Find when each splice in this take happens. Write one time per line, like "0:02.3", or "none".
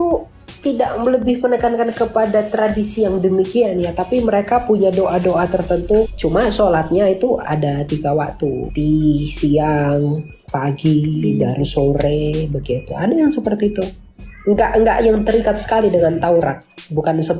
0:06.1
0:08.7